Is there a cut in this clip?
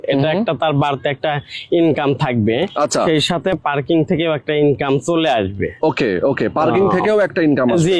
no; 0 cuts

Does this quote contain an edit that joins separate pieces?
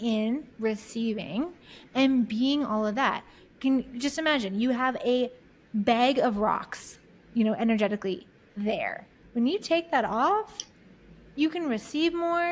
no; 0 cuts

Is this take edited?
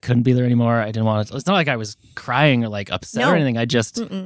no; 0 cuts

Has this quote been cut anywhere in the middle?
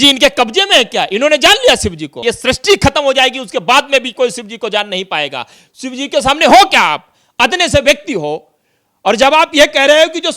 yes; 1 cut; at 2.2 s

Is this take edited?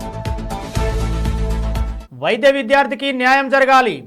yes; 1 cut; at 1.9 s

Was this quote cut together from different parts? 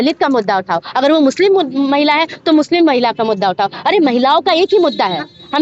no; 0 cuts

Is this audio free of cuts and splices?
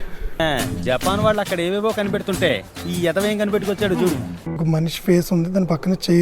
no; 1 cut; at 4.6 s

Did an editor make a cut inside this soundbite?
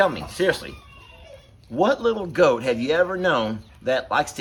no; 0 cuts

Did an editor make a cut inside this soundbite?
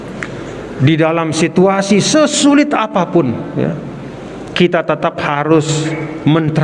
no; 0 cuts

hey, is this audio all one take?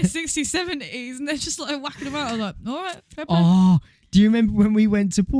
yes; 0 cuts

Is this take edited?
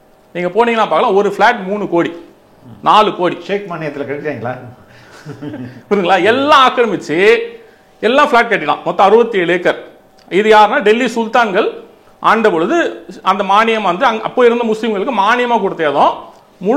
no; 0 cuts

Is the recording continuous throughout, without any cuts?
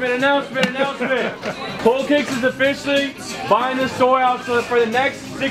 no; 1 cut; at 1.8 s

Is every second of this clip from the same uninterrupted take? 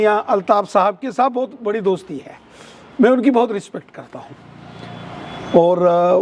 yes; 0 cuts

